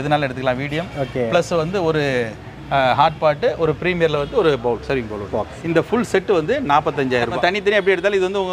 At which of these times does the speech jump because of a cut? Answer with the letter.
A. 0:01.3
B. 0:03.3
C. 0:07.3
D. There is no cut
C